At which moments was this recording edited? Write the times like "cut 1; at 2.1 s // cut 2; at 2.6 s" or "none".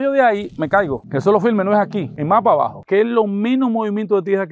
cut 1; at 1.0 s // cut 2; at 2.7 s

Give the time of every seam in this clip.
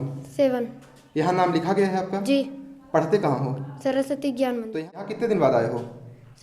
cut 1; at 4.8 s

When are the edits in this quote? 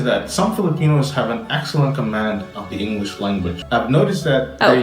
cut 1; at 3.6 s

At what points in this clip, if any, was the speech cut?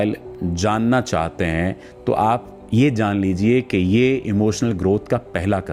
none

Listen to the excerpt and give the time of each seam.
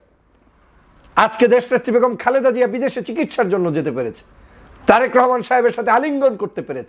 none

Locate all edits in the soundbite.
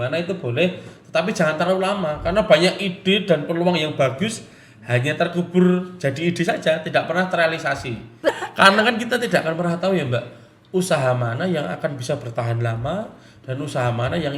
cut 1; at 8.3 s

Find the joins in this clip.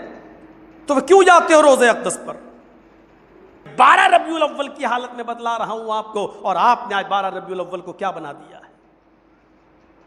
cut 1; at 3.7 s

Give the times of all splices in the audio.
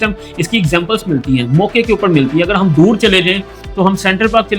none

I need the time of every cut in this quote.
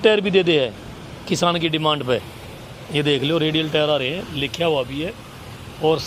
none

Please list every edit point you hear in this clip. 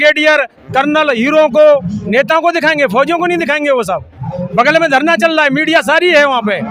none

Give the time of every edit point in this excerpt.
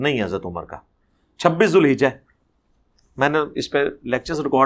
none

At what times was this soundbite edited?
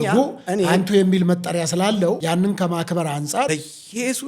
cut 1; at 2.2 s // cut 2; at 3.5 s

